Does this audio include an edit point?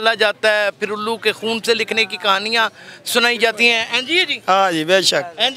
no; 0 cuts

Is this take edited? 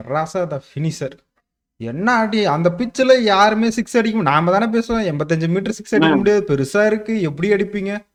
no; 0 cuts

